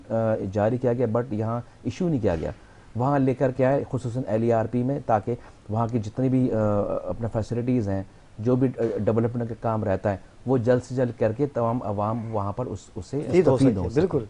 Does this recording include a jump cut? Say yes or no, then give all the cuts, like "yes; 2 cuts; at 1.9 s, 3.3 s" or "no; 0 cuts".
yes; 1 cut; at 13.3 s